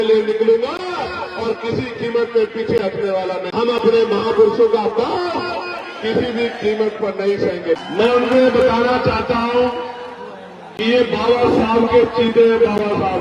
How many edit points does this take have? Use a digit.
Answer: 2